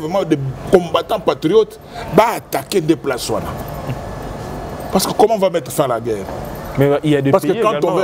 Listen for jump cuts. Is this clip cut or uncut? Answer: uncut